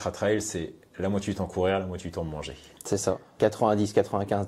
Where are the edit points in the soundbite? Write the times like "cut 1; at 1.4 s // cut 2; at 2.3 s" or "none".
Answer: cut 1; at 3.3 s